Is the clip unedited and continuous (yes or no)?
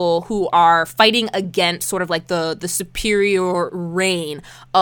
yes